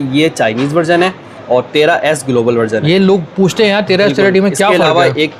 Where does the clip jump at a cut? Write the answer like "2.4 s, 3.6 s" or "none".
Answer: none